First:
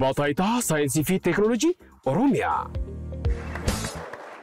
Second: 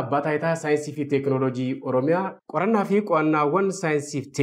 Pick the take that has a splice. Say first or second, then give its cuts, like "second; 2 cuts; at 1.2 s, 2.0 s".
first; 1 cut; at 3.5 s